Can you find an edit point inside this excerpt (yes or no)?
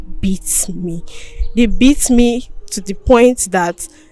no